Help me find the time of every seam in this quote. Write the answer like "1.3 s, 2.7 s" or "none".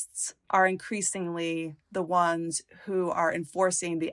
none